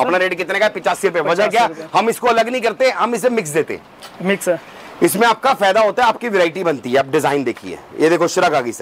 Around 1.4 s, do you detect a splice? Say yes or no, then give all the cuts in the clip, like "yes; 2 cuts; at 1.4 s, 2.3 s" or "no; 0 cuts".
no; 0 cuts